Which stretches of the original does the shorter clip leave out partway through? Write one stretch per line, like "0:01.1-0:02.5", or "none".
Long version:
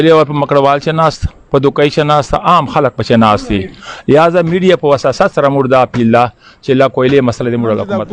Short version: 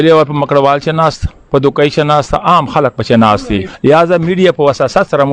0:03.7-0:03.9